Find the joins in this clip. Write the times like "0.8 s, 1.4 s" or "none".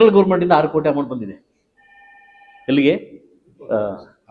none